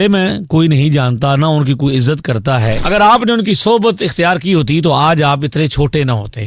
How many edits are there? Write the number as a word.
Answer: one